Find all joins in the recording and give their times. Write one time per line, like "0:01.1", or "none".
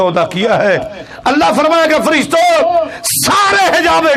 none

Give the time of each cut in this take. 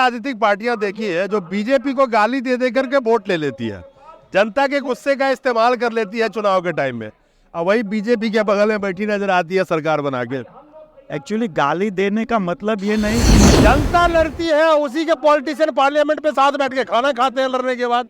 0:13.5

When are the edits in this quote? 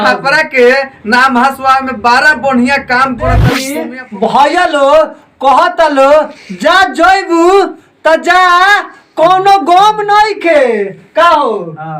0:03.7

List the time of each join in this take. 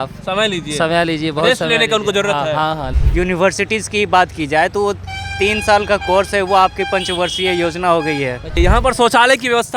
0:03.0
0:08.6

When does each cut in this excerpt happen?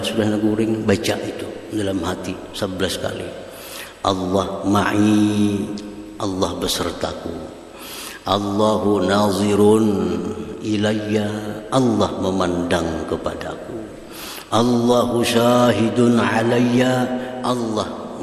none

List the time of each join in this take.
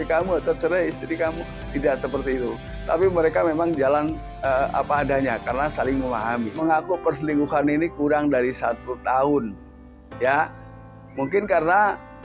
0:06.5

